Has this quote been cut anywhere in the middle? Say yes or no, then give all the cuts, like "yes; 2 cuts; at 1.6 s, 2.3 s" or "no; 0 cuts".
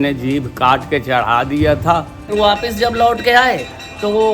yes; 1 cut; at 2.3 s